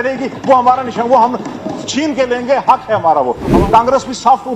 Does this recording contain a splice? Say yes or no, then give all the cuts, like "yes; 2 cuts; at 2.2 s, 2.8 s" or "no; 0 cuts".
yes; 1 cut; at 3.5 s